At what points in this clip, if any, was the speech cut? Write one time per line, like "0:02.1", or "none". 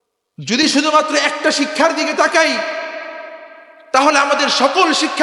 none